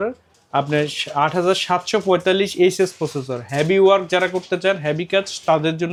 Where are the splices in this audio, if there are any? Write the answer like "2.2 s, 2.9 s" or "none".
none